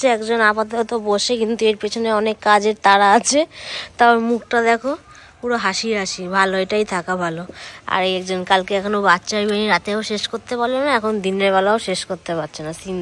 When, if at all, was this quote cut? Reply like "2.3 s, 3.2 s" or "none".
none